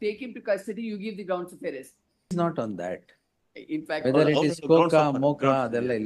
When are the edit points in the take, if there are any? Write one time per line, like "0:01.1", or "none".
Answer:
0:02.3